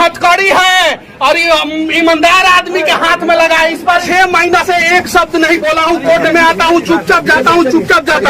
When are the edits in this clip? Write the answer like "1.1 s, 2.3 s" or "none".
4.0 s